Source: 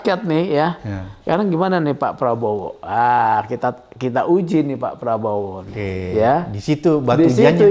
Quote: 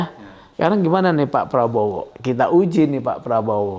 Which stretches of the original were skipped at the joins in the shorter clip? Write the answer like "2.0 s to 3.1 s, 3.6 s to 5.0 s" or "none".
2.8 s to 3.9 s